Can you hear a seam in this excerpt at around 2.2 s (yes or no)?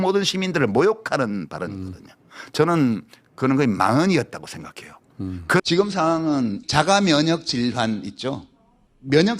no